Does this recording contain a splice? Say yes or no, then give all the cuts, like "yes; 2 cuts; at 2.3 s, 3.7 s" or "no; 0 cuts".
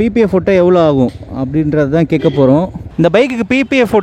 yes; 1 cut; at 2.8 s